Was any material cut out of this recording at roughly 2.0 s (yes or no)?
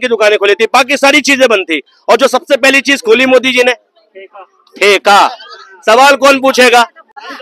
no